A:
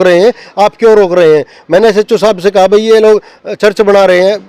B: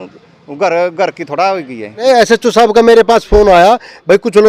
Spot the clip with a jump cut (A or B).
B